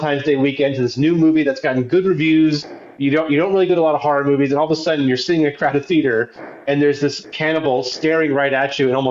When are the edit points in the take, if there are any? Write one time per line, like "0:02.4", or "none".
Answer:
none